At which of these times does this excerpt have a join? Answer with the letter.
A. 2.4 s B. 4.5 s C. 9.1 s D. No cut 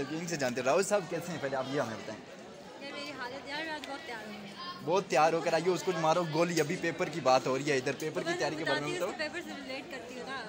D